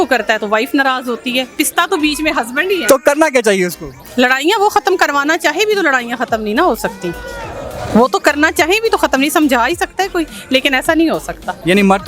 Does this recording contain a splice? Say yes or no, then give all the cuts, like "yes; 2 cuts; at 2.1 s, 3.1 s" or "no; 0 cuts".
no; 0 cuts